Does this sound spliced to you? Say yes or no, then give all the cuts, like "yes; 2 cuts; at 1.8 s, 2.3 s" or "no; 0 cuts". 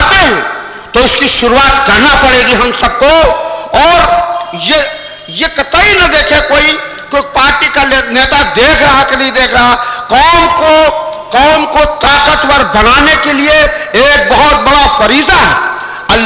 no; 0 cuts